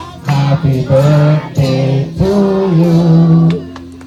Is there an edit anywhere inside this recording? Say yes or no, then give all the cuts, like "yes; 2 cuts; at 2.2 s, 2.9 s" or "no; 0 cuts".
no; 0 cuts